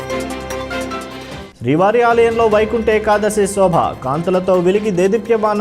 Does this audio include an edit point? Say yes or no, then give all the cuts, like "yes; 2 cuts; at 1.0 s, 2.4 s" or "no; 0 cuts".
yes; 1 cut; at 1.4 s